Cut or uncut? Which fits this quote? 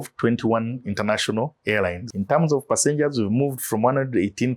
cut